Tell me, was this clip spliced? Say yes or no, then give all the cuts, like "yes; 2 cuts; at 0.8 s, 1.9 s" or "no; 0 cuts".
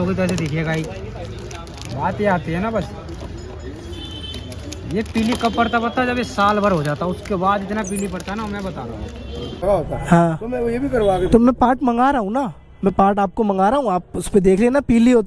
yes; 1 cut; at 9.6 s